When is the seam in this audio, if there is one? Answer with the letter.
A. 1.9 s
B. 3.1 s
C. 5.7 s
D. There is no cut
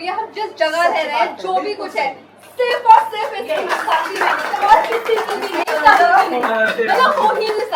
D